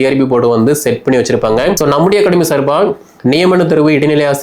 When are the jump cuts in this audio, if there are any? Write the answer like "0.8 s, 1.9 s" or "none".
1.8 s